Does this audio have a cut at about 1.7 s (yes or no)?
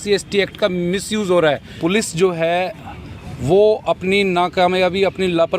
yes